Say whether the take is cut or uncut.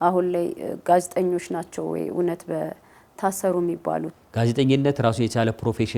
cut